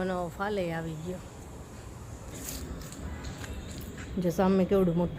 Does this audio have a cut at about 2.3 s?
yes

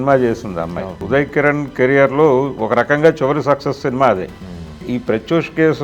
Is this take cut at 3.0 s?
no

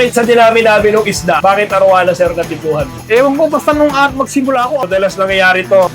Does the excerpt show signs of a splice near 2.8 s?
no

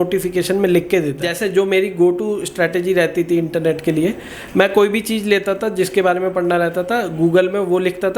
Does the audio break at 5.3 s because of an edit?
no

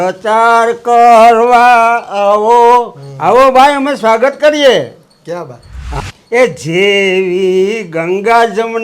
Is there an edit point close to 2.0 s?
no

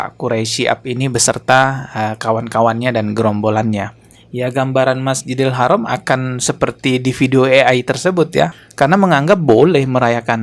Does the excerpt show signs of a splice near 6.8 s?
no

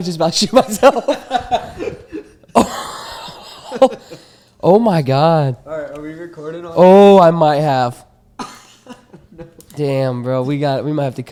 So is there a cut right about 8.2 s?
no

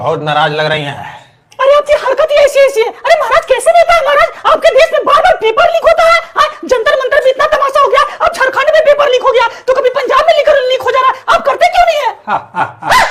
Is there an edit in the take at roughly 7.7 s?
no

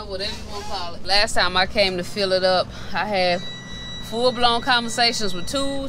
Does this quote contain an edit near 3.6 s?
no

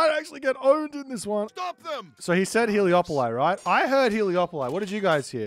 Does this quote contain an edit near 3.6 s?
no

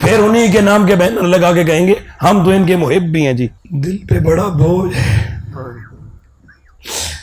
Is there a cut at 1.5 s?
no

